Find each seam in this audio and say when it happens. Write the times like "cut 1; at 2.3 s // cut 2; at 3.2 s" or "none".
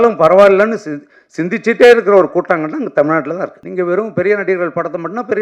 cut 1; at 3.6 s